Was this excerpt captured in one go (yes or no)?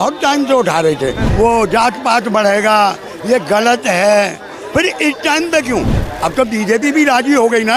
no